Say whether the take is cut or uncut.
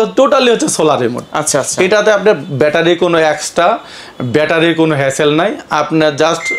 uncut